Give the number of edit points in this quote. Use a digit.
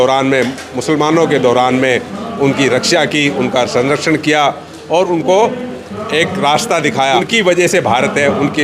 1